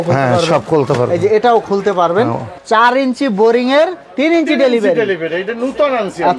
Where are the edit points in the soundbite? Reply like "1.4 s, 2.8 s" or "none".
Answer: 2.5 s

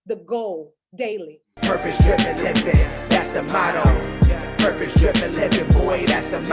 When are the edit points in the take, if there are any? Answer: 1.4 s

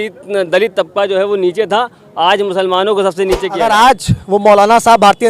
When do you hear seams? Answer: 3.5 s

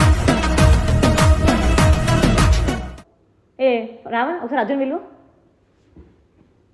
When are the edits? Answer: none

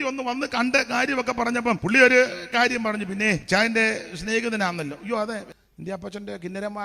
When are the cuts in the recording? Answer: 1.8 s, 3.4 s, 5.5 s

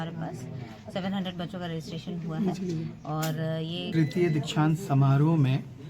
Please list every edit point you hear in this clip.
3.9 s

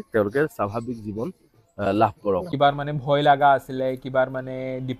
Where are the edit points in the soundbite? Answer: 2.5 s

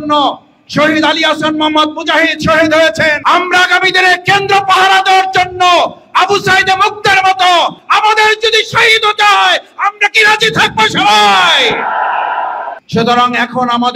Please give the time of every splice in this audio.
3.2 s, 7.8 s, 12.7 s

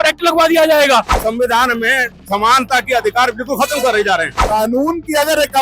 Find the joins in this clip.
1.1 s, 4.4 s

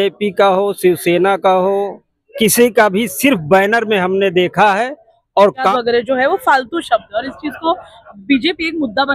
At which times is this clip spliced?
5.7 s

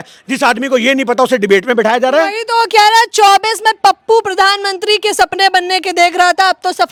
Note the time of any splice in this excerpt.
none

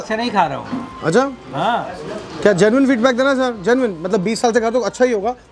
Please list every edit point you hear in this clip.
none

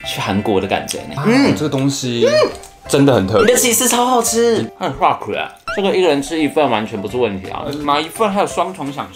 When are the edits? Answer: 1.1 s, 4.8 s

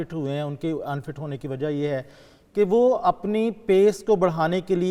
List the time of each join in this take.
none

